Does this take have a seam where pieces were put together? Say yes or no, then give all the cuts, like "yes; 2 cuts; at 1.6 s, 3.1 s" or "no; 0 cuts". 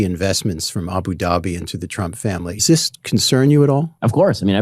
yes; 1 cut; at 2.6 s